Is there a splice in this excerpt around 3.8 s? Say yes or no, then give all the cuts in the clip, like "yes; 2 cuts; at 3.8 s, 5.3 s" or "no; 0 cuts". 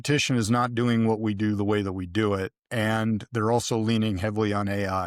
no; 0 cuts